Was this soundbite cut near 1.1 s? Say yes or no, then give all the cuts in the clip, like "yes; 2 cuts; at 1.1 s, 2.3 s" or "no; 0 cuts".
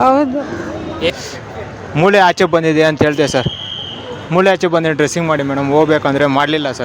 yes; 1 cut; at 1.1 s